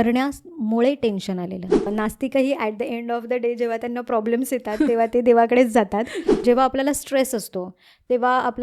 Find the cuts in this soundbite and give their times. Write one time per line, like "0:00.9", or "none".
0:01.9
0:06.4